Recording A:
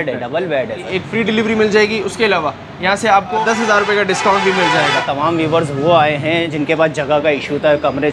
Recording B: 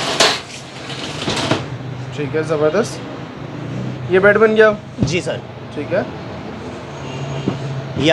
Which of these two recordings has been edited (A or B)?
A